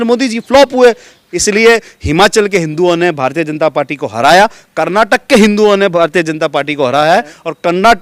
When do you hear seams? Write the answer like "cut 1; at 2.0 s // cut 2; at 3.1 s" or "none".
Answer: cut 1; at 1.3 s